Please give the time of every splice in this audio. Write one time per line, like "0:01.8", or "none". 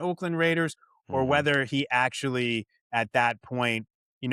none